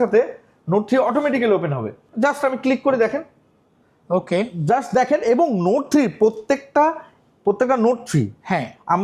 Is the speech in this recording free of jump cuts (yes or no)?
yes